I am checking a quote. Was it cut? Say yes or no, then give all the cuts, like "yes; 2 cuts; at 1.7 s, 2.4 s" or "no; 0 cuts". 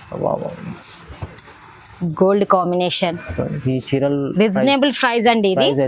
no; 0 cuts